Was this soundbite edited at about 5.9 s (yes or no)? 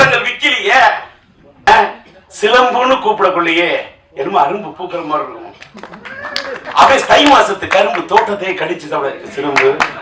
no